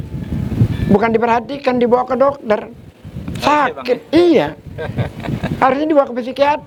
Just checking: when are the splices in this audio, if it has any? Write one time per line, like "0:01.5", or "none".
none